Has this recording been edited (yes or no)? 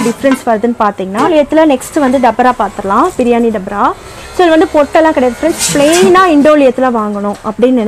yes